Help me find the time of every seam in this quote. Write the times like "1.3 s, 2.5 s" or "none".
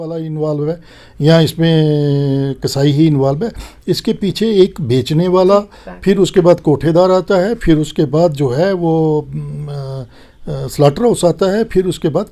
none